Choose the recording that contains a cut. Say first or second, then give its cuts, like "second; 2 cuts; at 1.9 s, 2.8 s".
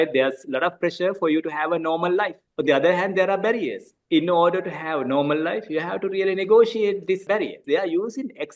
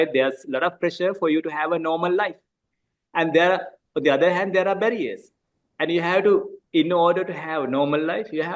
first; 3 cuts; at 2.4 s, 3.9 s, 7.4 s